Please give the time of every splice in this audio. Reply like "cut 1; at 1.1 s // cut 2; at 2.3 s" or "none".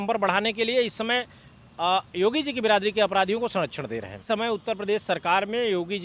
cut 1; at 4.2 s

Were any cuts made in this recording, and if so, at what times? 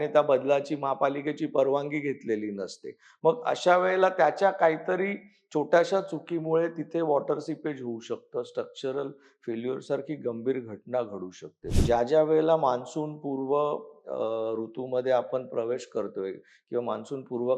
cut 1; at 11.6 s

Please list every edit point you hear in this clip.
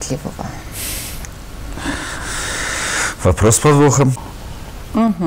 cut 1; at 4.3 s

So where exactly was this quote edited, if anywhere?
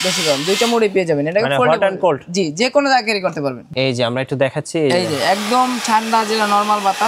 cut 1; at 3.6 s

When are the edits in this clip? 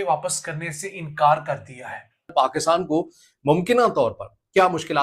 cut 1; at 2.6 s

